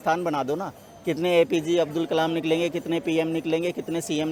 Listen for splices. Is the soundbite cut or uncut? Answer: uncut